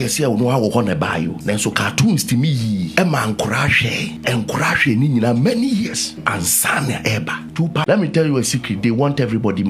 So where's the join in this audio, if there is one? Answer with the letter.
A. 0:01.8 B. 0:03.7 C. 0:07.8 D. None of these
C